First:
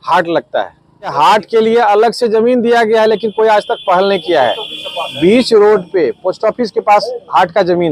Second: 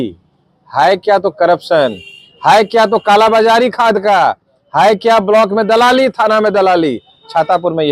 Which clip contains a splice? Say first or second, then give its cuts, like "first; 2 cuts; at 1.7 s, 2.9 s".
first; 1 cut; at 1.1 s